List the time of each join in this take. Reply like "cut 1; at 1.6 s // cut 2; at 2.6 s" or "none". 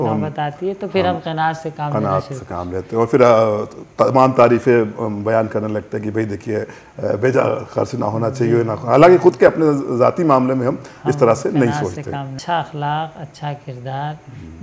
cut 1; at 12.4 s